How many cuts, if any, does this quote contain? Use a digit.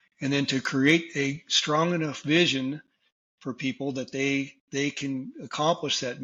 0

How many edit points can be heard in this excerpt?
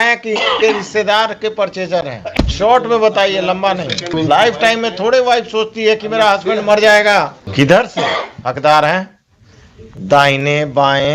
3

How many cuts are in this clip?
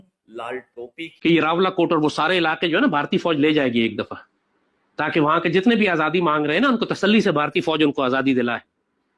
1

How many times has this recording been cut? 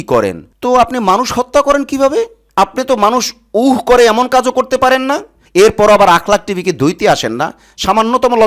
2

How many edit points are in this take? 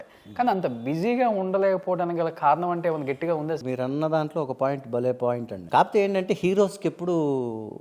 2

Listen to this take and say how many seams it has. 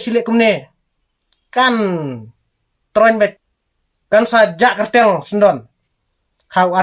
1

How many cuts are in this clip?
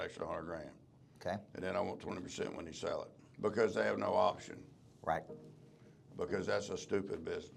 1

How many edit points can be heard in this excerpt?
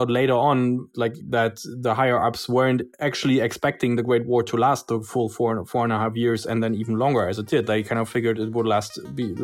2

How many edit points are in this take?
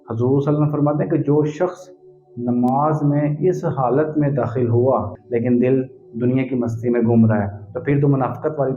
1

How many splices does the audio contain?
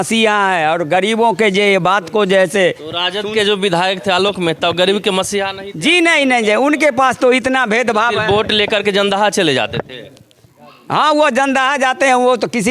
0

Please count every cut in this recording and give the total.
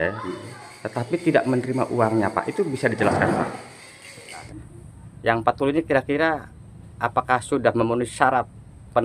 1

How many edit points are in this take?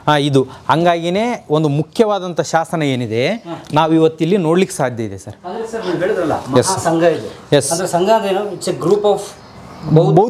0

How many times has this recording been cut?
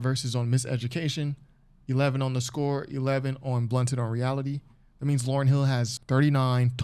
1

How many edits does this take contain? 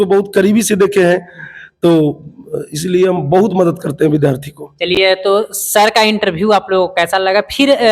0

